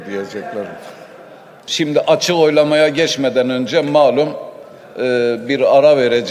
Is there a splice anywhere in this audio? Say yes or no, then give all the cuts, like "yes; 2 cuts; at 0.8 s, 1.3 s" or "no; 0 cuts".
yes; 1 cut; at 1.7 s